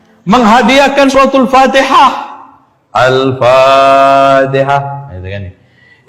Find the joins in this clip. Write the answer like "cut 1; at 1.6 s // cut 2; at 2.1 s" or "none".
cut 1; at 1.1 s